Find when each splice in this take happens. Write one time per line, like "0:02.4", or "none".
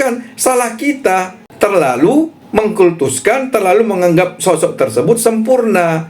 0:01.4
0:02.4